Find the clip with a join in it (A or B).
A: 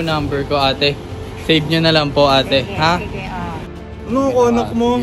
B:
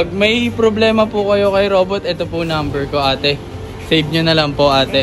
A